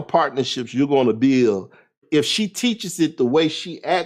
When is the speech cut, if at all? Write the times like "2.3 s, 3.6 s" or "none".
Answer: 2.0 s